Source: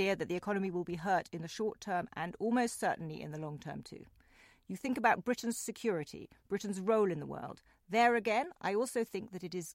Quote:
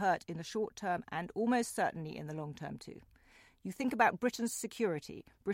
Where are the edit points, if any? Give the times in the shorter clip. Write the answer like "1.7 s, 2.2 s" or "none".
none